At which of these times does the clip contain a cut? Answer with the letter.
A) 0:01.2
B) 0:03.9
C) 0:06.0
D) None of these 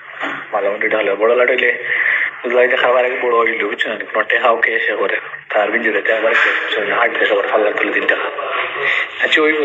D